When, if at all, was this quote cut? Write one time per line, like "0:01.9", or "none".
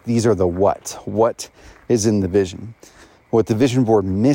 none